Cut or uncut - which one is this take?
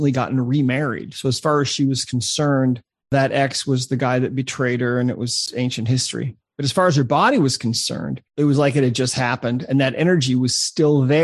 cut